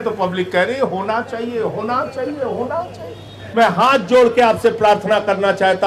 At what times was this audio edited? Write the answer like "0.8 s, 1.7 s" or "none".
3.4 s